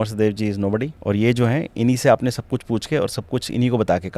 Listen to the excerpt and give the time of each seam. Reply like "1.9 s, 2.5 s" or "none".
0.9 s